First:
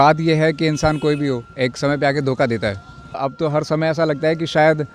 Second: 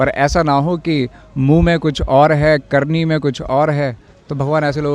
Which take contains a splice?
first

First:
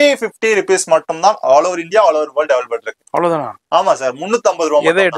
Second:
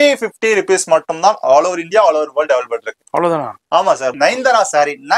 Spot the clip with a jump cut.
second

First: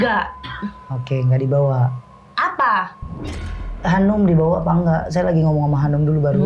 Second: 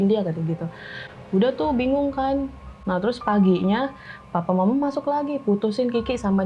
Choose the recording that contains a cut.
second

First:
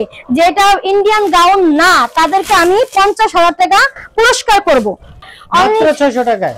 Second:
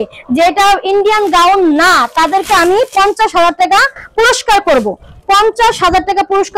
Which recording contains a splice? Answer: first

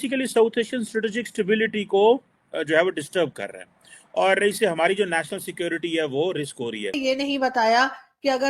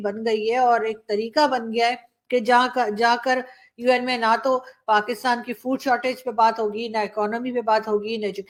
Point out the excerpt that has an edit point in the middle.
first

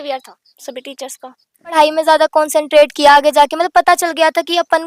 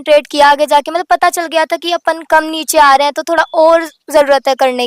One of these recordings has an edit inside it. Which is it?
first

